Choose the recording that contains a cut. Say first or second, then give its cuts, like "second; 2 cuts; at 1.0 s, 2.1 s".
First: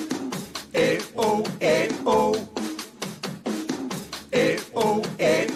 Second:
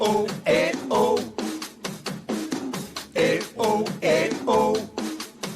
second; 1 cut; at 1.3 s